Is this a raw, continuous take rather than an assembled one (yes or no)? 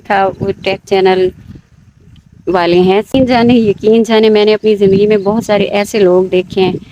no